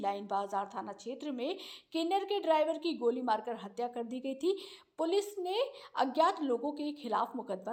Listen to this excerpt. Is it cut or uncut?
uncut